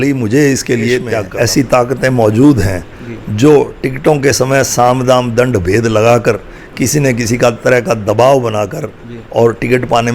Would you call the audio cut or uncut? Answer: cut